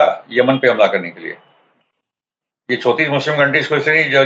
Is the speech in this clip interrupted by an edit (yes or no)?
no